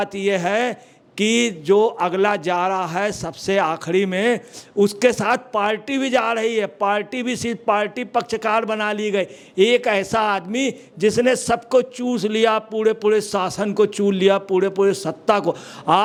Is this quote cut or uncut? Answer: uncut